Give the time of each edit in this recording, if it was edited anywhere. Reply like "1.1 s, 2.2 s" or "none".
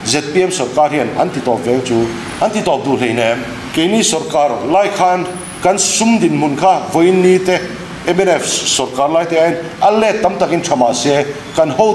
2.2 s, 3.6 s

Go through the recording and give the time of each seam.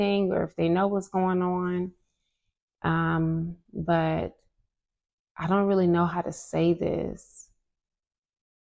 none

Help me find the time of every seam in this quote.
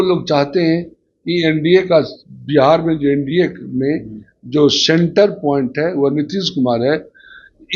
none

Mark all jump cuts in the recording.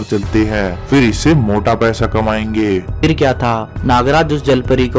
2.9 s

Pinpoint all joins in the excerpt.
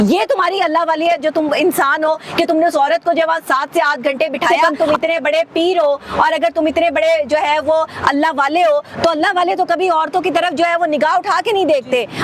4.6 s

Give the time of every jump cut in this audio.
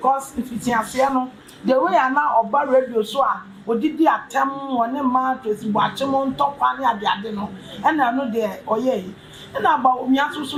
none

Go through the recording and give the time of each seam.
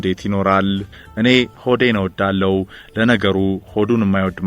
0.9 s

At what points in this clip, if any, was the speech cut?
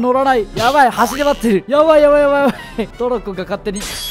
2.8 s

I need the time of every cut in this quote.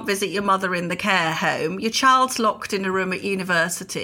none

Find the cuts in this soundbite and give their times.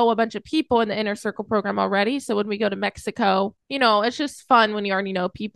3.6 s

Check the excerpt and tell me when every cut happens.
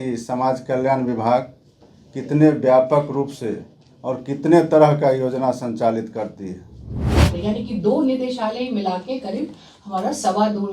7.2 s

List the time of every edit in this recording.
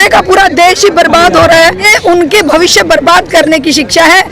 1.9 s

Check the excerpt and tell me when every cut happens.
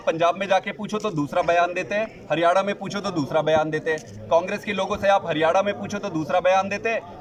none

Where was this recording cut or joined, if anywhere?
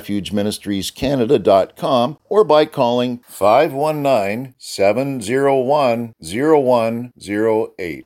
2.2 s

